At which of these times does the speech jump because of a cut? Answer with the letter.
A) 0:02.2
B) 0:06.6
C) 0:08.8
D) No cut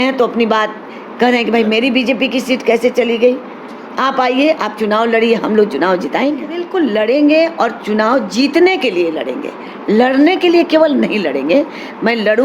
B